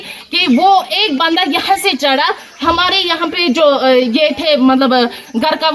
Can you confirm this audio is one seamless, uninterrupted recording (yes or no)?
yes